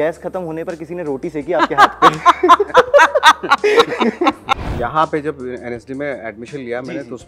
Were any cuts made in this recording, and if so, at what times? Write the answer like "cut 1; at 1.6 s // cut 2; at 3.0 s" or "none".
cut 1; at 4.5 s